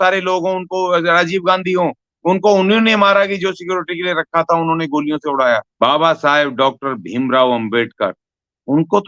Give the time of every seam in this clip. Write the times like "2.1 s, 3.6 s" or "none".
5.7 s